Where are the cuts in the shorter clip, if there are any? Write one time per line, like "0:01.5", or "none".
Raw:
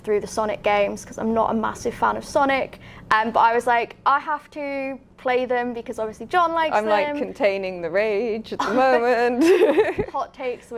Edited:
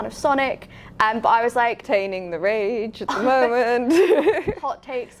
0:01.8